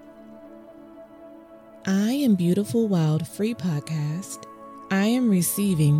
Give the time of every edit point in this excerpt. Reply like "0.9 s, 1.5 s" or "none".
1.3 s